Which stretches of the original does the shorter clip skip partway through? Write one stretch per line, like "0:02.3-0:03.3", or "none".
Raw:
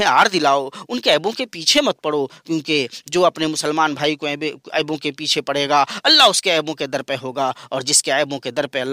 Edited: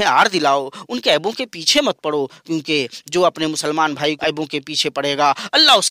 0:04.2-0:04.7